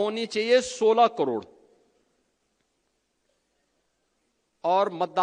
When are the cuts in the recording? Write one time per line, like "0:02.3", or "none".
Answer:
none